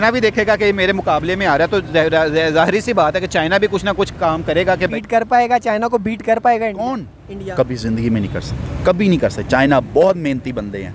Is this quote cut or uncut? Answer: cut